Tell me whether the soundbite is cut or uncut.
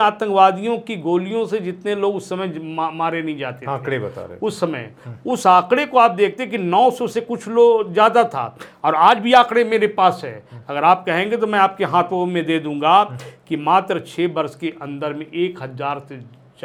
uncut